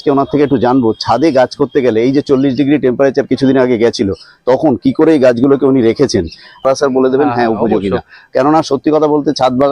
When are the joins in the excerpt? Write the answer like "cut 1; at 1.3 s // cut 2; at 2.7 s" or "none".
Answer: cut 1; at 6.6 s